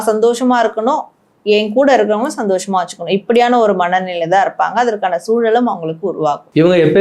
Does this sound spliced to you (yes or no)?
no